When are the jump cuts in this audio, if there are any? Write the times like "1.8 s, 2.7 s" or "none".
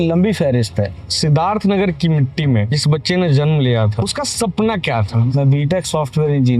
1.0 s, 2.7 s, 4.0 s, 5.3 s